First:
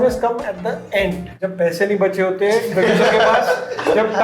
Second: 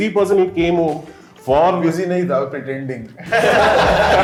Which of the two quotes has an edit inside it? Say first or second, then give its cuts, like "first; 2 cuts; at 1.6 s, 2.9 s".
first; 1 cut; at 1.3 s